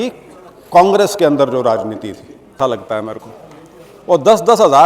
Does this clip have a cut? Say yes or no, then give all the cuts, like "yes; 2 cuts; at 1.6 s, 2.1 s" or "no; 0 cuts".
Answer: yes; 1 cut; at 2.6 s